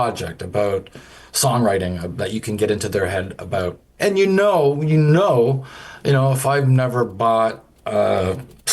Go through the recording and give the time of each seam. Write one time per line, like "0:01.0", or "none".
0:03.8